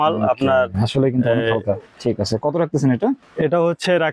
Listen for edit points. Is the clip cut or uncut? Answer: cut